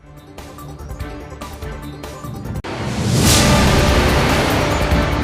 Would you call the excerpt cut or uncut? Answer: cut